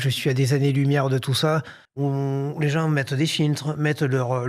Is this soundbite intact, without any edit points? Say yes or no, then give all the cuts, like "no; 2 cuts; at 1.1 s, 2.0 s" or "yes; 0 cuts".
no; 1 cut; at 1.8 s